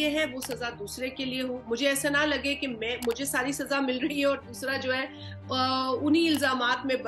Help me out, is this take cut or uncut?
uncut